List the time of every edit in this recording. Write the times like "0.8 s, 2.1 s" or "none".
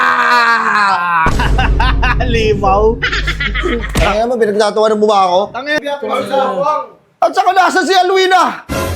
5.7 s